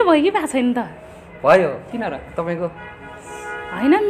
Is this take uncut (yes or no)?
yes